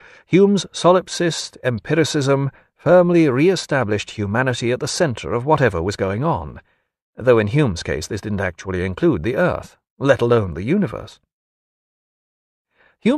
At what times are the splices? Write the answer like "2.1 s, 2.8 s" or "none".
none